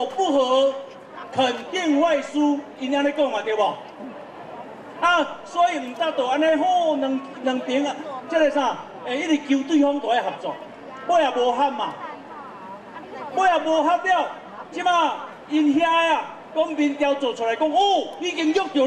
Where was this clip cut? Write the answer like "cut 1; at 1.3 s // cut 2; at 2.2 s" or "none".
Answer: none